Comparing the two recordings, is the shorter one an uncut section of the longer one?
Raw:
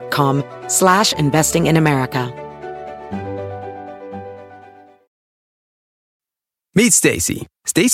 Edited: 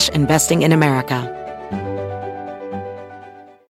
no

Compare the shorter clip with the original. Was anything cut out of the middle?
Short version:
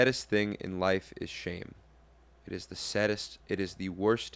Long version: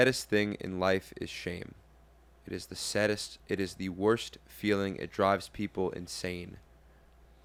no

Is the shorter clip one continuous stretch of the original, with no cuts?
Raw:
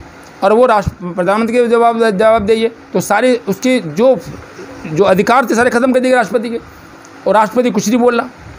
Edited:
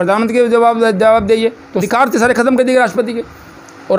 no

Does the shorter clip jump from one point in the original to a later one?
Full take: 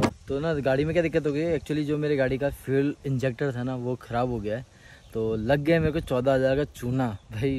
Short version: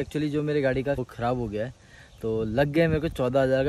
yes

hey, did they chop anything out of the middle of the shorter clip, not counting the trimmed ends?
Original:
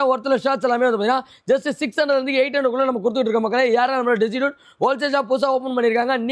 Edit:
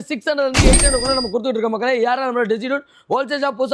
no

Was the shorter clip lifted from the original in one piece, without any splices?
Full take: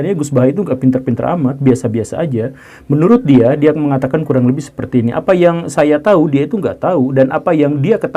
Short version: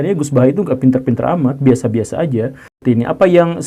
no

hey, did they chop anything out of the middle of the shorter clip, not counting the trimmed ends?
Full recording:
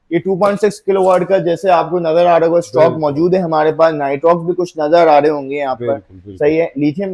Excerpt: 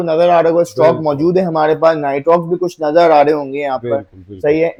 no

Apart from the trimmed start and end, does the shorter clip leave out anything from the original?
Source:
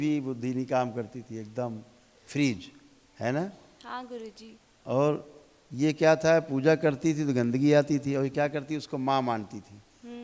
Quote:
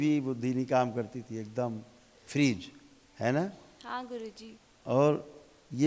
no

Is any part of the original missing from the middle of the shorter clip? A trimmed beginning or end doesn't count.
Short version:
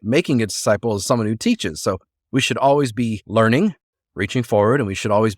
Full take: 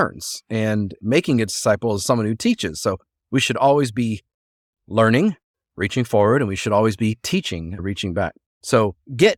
yes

